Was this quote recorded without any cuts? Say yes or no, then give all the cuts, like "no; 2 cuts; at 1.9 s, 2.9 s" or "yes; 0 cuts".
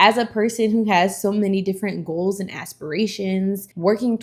yes; 0 cuts